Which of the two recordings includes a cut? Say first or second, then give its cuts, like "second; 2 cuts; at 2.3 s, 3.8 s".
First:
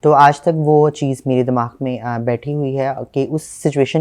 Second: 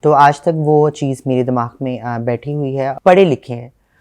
second; 1 cut; at 3.0 s